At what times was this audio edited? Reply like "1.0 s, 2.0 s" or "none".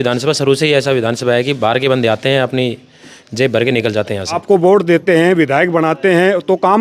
4.4 s